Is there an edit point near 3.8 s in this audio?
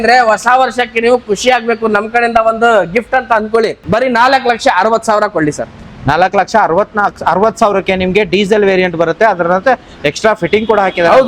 yes; 1 cut; at 3.8 s

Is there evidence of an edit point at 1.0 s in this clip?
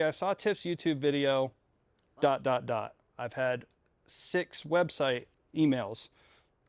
no; 1 cut; at 5.4 s

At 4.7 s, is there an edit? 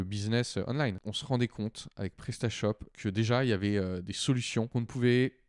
yes; 3 cuts; at 1.0 s, 2.9 s, 4.7 s

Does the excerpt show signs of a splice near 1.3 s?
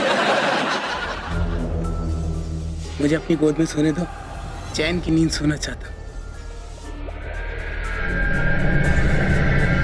yes; 1 cut; at 1.3 s

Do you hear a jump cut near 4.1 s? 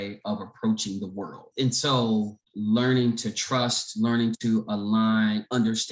no; 2 cuts; at 1.5 s, 2.4 s

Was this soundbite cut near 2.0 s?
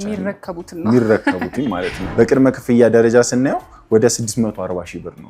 yes; 1 cut; at 2.0 s

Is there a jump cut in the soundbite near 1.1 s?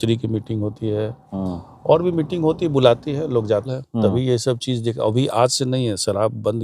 no; 1 cut; at 3.8 s

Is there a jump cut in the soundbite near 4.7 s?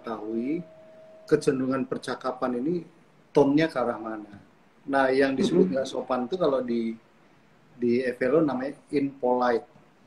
no; 0 cuts

